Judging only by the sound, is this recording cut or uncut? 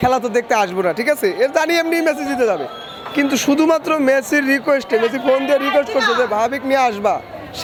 uncut